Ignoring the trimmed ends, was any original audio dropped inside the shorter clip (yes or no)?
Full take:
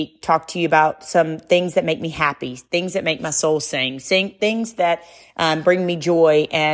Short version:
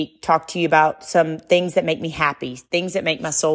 no